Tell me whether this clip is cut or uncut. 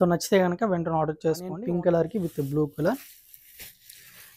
cut